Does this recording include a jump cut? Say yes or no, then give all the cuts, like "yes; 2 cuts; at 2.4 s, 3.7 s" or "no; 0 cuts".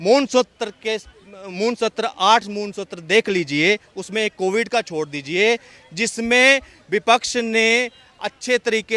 no; 0 cuts